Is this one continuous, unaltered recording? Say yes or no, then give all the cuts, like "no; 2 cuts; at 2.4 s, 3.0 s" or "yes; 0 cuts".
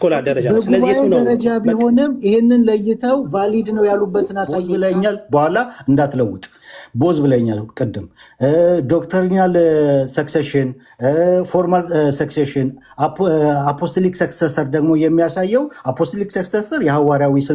no; 1 cut; at 4.6 s